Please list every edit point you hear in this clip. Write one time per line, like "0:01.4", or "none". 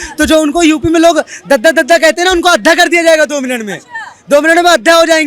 none